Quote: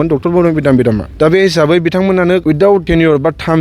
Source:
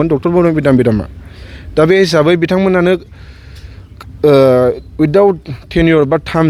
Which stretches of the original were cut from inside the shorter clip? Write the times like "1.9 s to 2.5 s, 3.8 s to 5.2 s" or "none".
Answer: 1.1 s to 1.6 s, 3.2 s to 5.5 s

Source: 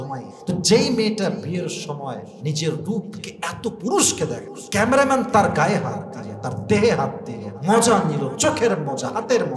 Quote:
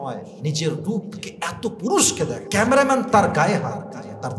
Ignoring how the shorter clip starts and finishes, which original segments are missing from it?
4.4 s to 4.6 s

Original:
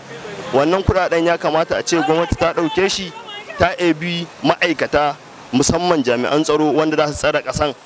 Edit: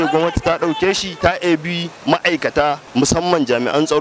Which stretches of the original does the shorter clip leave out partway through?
3.0 s to 3.4 s, 5.2 s to 5.4 s

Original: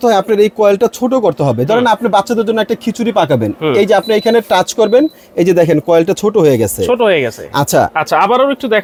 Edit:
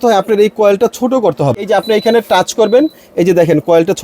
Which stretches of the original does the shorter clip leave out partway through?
1.6 s to 3.8 s

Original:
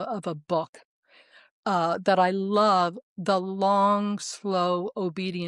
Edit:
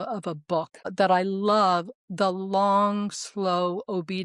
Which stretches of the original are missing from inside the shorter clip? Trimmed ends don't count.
0.9 s to 2.0 s

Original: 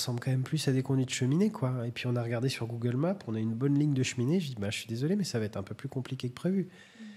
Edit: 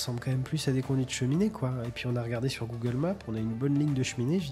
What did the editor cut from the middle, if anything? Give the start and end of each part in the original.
none

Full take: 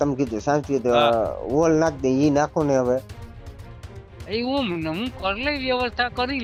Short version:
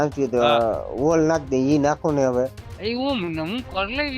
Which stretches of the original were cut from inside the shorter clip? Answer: 3.2 s to 4.1 s

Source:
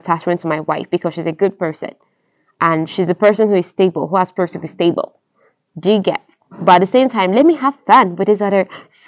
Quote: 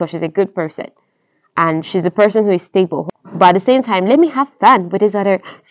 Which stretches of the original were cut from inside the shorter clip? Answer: 4.0 s to 6.3 s

